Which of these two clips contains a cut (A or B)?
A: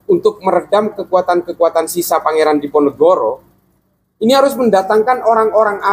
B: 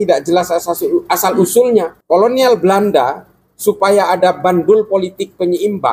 B